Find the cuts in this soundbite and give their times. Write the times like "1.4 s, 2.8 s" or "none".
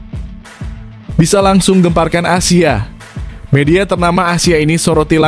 1.2 s